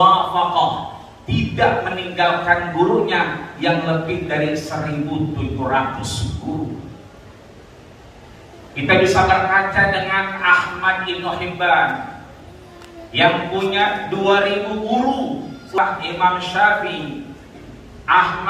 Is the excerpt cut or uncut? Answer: uncut